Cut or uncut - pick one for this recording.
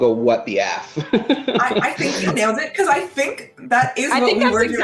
uncut